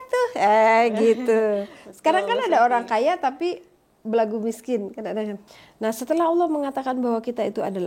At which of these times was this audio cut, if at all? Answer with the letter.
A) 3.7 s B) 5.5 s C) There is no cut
B